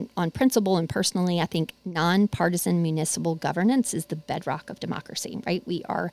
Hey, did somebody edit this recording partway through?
no; 0 cuts

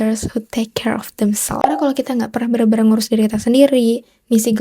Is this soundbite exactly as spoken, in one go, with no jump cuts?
no; 1 cut; at 1.8 s

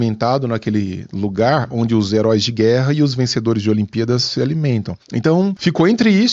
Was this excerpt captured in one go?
no; 1 cut; at 5.4 s

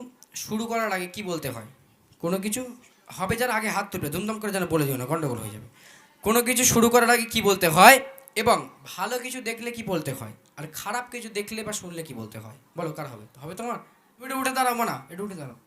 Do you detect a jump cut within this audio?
yes; 1 cut; at 14.3 s

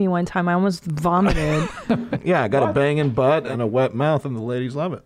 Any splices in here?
yes; 2 cuts; at 2.2 s, 3.5 s

